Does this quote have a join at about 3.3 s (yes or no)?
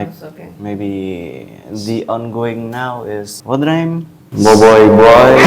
yes